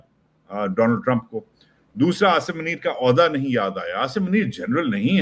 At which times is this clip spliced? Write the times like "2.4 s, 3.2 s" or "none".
none